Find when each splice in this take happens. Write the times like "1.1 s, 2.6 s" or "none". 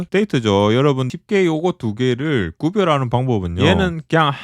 1.0 s, 3.5 s